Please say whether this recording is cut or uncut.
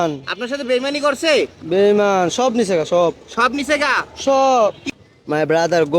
cut